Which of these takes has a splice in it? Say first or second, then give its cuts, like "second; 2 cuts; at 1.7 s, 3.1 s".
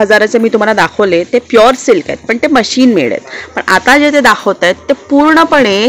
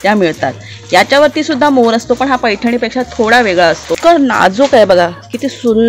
second; 1 cut; at 3.9 s